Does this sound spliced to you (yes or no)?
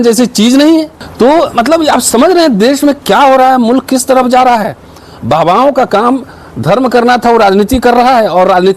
yes